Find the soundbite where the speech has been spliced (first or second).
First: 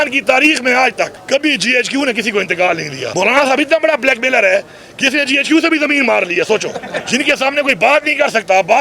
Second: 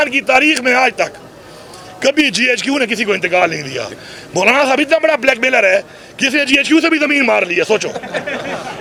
first